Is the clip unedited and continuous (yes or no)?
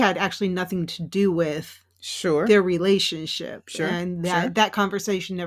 yes